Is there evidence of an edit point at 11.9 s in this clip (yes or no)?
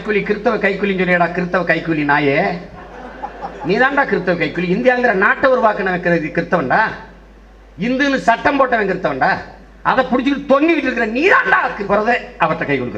yes